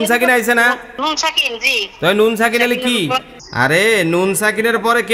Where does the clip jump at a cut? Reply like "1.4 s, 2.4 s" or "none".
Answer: 0.9 s, 3.4 s